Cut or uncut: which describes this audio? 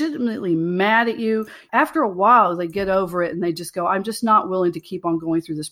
cut